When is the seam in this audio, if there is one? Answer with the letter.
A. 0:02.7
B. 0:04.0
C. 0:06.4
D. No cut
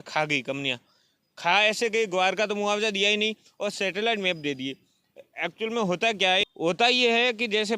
C